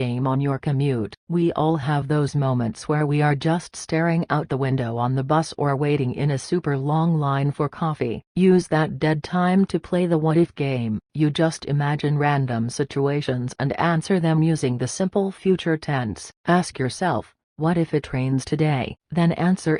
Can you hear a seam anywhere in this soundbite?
no; 0 cuts

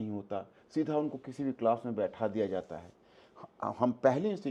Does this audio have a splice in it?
no; 0 cuts

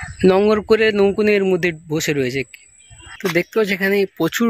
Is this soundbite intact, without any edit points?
no; 1 cut; at 2.6 s

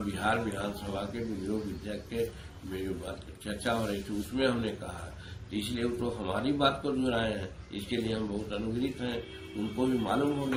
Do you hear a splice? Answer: no; 0 cuts

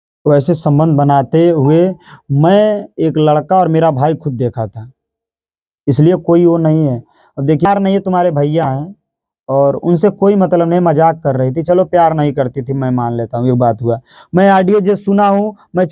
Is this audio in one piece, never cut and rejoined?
no; 1 cut; at 7.7 s

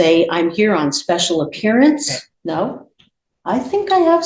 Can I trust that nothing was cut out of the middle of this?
no; 1 cut; at 2.2 s

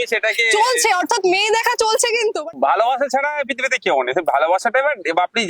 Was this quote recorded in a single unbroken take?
no; 1 cut; at 2.5 s

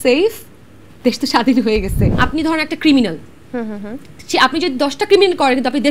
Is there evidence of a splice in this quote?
yes; 1 cut; at 2.1 s

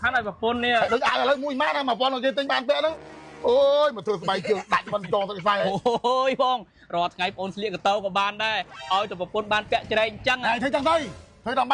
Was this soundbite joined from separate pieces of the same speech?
yes; 1 cut; at 5.7 s

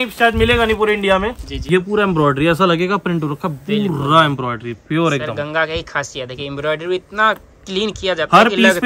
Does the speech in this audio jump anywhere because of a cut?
yes; 1 cut; at 1.5 s

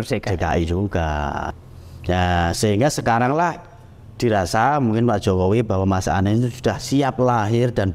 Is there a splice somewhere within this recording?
yes; 1 cut; at 1.5 s

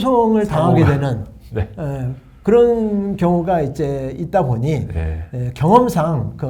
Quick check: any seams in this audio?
no; 0 cuts

